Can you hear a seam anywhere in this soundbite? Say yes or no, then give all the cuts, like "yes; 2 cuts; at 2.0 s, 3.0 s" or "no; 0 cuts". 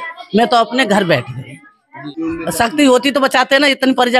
yes; 1 cut; at 1.9 s